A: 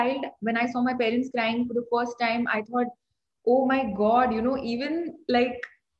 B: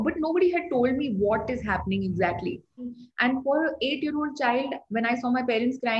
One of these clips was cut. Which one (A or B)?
B